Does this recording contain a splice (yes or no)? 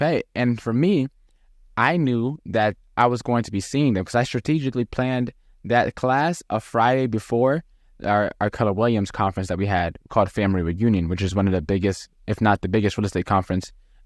no